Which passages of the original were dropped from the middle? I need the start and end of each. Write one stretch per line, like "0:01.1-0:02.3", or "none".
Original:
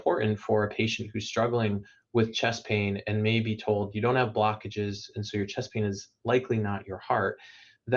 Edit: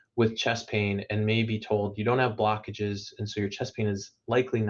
none